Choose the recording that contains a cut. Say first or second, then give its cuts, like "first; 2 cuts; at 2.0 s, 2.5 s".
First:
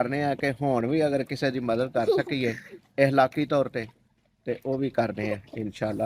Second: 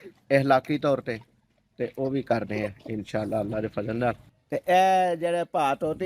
second; 1 cut; at 4.3 s